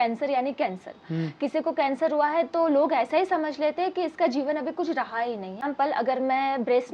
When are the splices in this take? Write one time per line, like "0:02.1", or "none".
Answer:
0:05.6